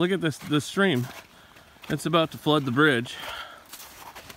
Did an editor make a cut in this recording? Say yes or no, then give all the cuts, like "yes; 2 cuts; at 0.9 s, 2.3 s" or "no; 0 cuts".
no; 0 cuts